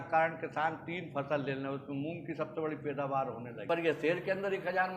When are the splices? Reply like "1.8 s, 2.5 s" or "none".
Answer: 3.5 s